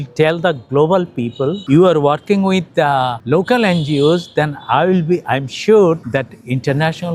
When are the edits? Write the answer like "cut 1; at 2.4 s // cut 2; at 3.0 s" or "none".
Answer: cut 1; at 1.6 s // cut 2; at 3.2 s // cut 3; at 6.0 s